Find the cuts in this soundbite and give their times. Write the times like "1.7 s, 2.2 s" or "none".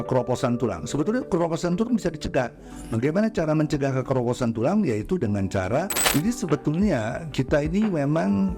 6.0 s